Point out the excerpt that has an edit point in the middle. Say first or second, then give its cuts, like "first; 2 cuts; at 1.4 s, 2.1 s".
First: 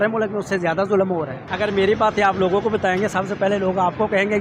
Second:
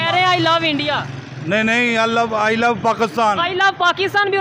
first; 1 cut; at 1.4 s